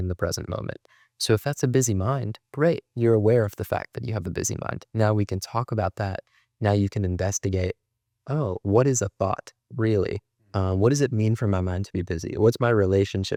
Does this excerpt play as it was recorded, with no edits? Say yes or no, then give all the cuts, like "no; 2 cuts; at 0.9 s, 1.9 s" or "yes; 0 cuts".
yes; 0 cuts